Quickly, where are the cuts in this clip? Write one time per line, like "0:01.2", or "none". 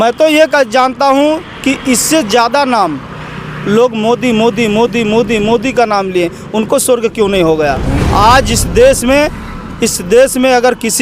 0:07.9

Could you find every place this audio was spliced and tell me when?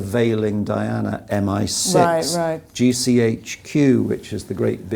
none

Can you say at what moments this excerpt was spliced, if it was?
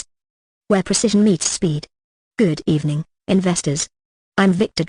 0:03.4

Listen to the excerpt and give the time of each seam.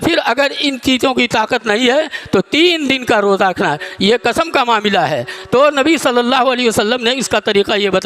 none

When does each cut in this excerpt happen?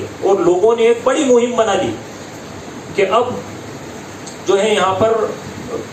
none

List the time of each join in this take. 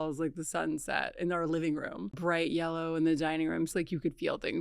0:02.2
0:03.7

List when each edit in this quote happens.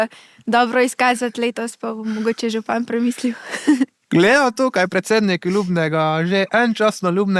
none

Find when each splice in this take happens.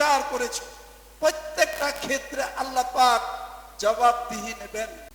none

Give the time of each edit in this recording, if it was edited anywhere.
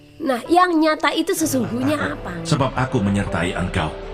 0:02.4

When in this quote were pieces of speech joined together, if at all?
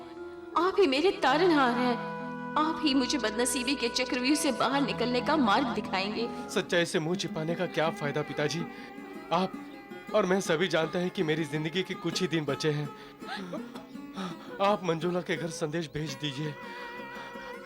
0:06.4
0:13.4

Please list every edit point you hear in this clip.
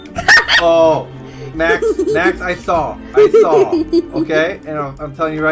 none

